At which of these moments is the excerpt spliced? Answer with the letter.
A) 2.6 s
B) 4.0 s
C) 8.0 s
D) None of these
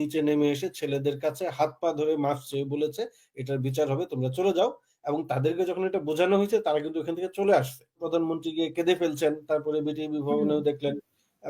C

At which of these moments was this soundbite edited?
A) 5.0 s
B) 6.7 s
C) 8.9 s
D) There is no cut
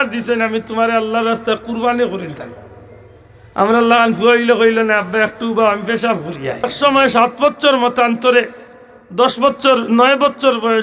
B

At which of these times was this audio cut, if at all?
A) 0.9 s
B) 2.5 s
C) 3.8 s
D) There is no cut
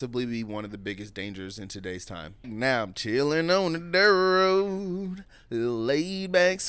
B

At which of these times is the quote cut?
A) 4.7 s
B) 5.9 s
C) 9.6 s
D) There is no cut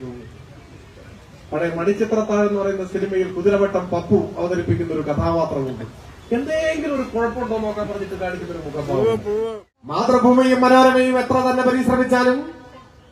C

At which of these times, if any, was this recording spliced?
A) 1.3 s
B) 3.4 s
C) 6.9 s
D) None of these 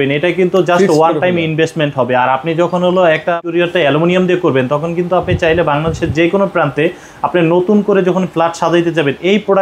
B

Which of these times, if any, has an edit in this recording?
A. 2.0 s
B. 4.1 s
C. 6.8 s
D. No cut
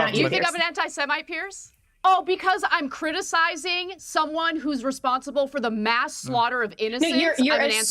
A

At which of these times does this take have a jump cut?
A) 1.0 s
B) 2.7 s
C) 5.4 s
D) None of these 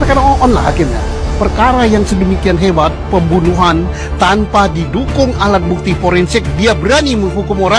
D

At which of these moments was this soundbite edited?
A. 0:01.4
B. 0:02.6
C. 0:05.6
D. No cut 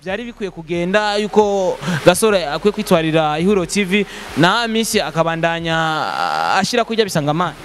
D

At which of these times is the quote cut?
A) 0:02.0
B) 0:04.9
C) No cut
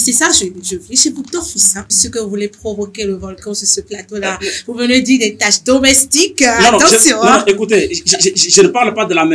A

